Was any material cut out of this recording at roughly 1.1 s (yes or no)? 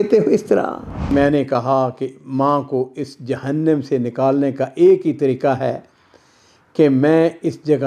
yes